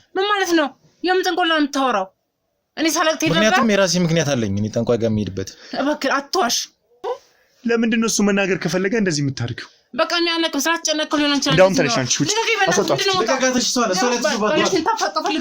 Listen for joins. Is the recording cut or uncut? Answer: cut